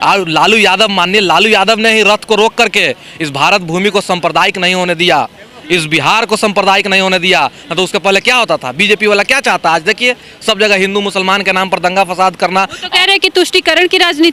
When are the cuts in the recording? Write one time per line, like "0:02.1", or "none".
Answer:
none